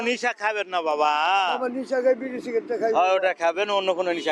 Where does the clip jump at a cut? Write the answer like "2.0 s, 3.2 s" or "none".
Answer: none